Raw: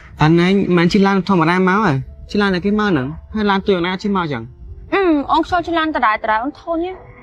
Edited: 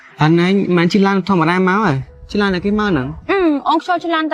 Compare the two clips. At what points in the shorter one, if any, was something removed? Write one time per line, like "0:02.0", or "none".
0:03.1